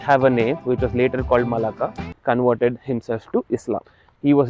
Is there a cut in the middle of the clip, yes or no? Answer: yes